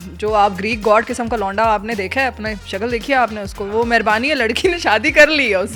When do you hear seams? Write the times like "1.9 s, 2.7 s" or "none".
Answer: none